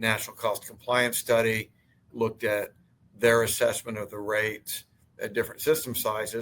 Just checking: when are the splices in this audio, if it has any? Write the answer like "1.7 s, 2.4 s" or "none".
2.1 s